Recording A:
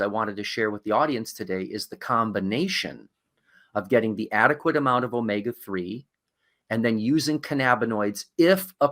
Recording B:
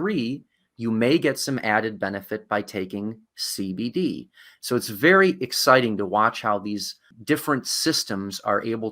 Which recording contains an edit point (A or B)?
B